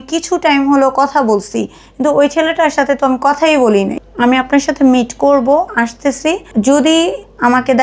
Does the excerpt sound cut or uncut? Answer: cut